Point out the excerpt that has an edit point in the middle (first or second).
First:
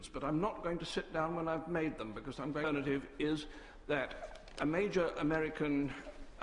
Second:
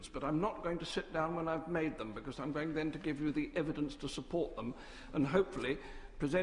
second